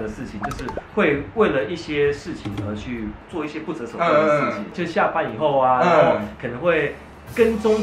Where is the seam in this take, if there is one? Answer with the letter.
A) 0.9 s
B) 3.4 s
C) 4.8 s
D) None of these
C